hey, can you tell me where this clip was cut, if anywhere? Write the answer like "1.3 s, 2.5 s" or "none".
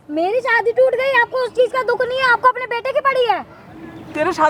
none